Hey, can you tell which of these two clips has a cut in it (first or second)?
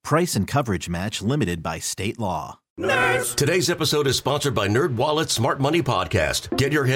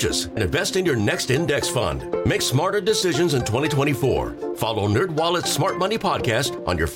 first